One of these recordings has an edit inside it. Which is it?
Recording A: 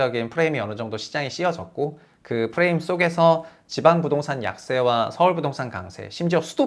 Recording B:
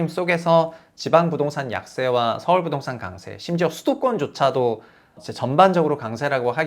B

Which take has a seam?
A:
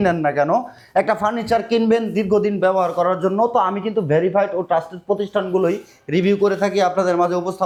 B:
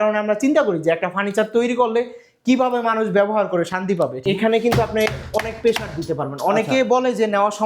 B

